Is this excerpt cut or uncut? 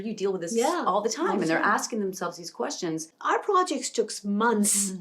cut